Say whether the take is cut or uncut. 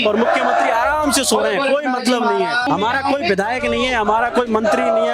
cut